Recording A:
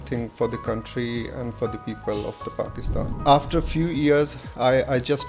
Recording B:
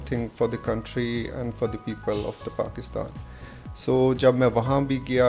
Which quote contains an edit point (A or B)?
A